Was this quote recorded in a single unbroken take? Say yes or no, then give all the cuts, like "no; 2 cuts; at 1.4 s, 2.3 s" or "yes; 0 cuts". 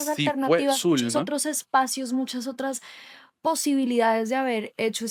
yes; 0 cuts